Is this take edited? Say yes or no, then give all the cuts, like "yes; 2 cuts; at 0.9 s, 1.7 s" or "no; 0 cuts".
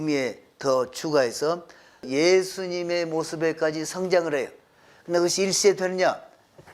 yes; 1 cut; at 2.1 s